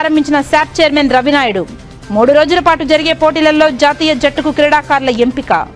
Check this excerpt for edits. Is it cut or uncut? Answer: uncut